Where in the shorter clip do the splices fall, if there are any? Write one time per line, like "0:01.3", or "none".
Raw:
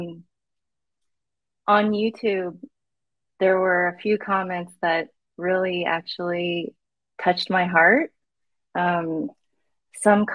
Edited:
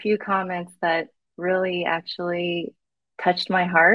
none

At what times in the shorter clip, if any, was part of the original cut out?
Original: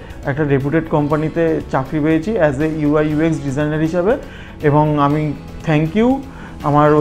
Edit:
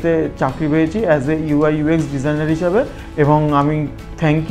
0:03.0

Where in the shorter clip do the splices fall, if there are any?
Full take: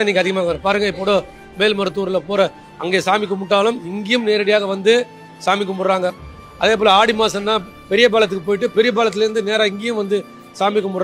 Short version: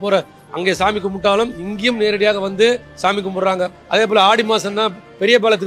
0:03.4

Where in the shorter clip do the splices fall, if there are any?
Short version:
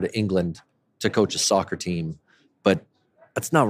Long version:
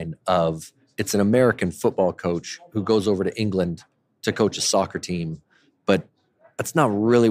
none

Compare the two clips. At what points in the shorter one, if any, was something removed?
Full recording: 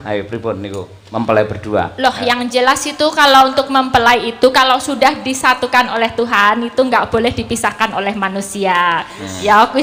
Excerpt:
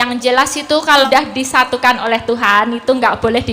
0:01.0

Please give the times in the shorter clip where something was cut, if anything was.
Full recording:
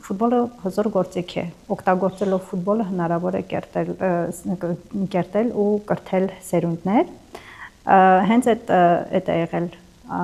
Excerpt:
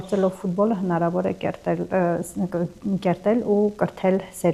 none

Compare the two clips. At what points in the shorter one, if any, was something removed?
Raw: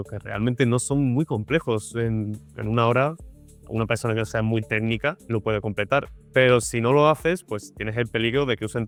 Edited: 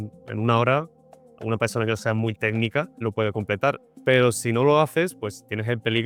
none

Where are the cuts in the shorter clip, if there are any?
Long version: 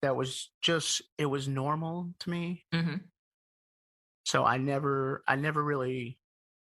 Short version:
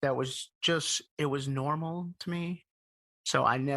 0:02.6

